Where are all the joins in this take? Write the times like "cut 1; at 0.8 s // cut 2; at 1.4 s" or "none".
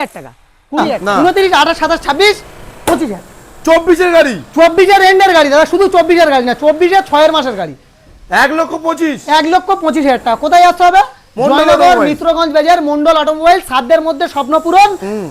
cut 1; at 1.0 s